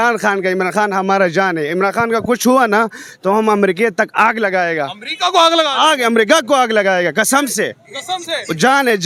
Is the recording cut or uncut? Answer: uncut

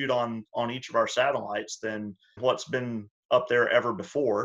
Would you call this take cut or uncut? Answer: cut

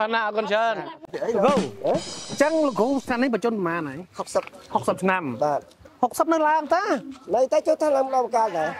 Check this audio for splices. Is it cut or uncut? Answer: cut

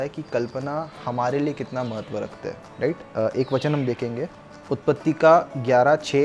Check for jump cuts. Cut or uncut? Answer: uncut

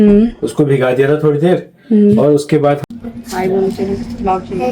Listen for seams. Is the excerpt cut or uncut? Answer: cut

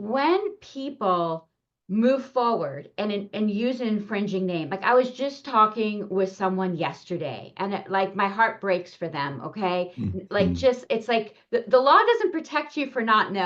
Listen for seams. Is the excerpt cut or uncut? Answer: uncut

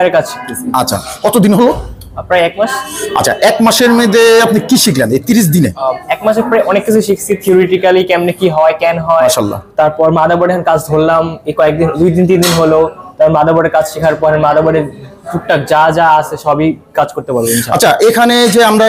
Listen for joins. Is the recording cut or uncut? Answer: uncut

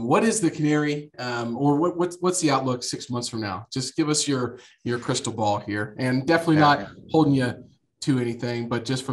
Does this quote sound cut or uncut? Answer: uncut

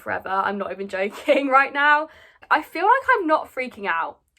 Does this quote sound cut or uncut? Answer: cut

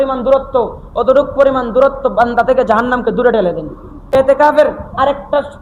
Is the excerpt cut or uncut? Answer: cut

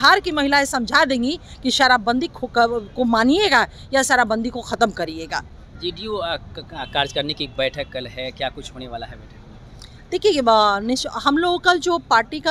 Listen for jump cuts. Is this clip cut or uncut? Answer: uncut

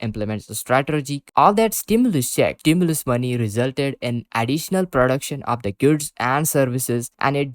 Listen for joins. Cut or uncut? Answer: cut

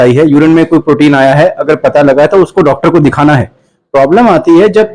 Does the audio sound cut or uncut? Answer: uncut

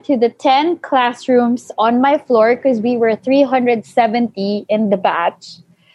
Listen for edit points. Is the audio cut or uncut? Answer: uncut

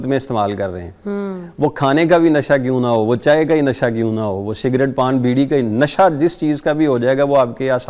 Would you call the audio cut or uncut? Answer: uncut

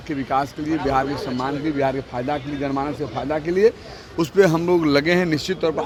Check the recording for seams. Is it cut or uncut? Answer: uncut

